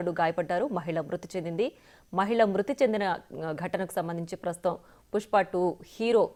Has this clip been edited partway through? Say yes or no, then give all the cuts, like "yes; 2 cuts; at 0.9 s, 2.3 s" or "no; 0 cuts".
no; 0 cuts